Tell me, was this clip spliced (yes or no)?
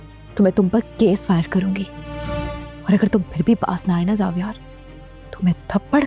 no